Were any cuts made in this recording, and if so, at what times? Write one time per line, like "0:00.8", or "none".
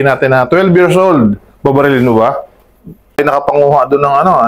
0:03.2